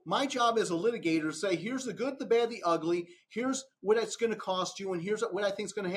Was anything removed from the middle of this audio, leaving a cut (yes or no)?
no